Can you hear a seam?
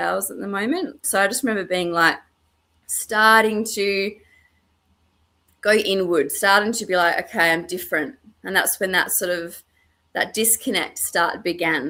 no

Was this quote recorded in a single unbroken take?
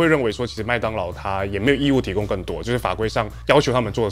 yes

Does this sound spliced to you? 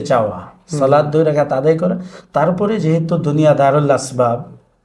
no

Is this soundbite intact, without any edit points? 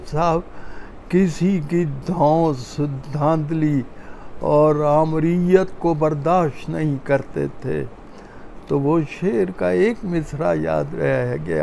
yes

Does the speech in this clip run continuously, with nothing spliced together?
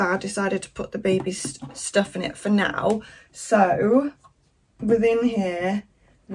yes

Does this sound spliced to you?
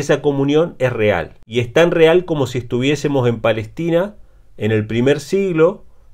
yes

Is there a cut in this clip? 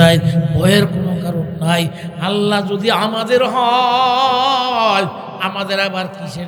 no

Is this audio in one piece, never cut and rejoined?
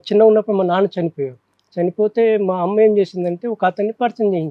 yes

